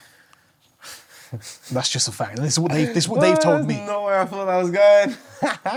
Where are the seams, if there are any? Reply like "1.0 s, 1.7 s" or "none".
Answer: none